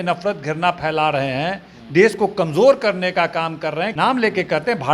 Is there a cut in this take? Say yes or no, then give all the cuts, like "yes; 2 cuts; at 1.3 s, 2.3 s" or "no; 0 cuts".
yes; 1 cut; at 3.9 s